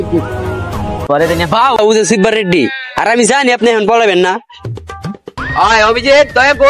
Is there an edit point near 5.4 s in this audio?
yes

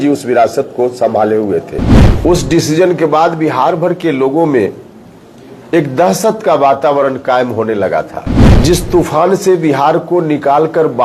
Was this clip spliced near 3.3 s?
no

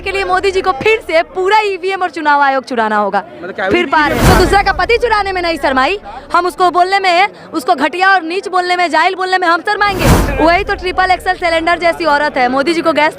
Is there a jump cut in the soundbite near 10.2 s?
yes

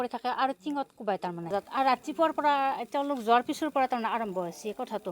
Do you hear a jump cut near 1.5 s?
yes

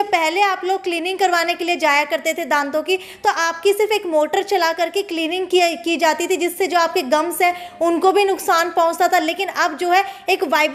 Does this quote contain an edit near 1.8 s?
no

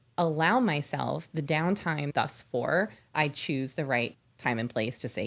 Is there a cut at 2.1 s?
yes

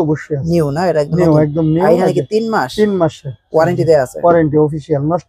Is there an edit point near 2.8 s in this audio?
no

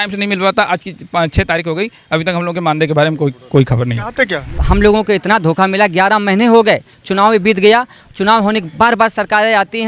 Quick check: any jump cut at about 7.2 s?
no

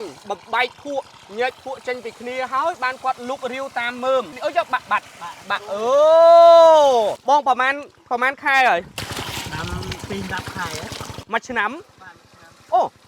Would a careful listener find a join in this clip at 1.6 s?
no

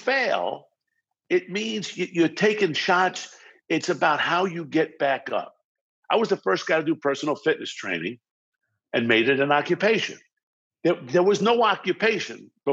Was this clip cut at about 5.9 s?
yes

